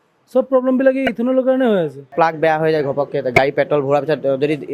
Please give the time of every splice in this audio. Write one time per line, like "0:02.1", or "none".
0:02.1